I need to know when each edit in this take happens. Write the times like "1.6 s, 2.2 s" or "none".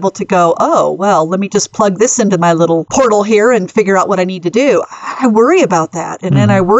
2.9 s